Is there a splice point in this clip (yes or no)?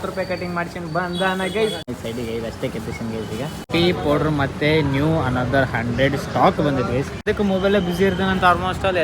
yes